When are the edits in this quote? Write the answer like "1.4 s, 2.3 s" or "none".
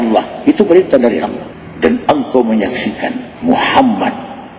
3.2 s

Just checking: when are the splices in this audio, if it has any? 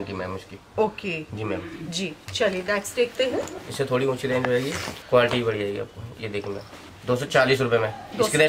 none

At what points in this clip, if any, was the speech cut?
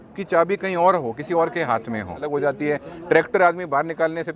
2.2 s

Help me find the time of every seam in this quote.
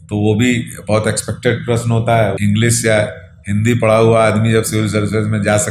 2.4 s

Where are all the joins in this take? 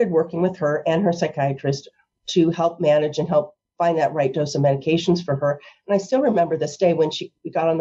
none

